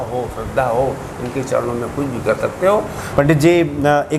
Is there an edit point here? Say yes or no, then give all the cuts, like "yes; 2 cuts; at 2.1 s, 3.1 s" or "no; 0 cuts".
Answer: yes; 1 cut; at 3.1 s